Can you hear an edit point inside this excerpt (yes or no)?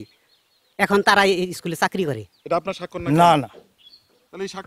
yes